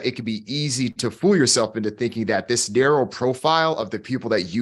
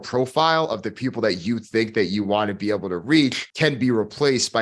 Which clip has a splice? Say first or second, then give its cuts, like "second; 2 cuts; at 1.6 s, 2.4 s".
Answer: second; 1 cut; at 3.4 s